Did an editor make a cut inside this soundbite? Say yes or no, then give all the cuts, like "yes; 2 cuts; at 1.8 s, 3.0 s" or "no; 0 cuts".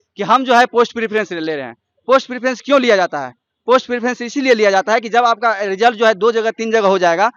no; 0 cuts